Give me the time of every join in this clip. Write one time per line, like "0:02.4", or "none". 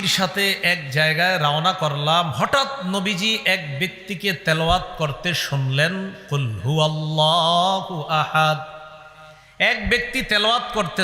none